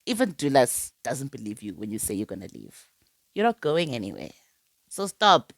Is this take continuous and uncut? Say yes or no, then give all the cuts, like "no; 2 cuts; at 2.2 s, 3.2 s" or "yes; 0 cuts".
yes; 0 cuts